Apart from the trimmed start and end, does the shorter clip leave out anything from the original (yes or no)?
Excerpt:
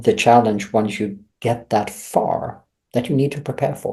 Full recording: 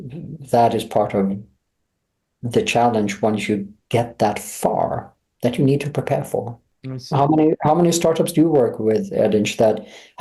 no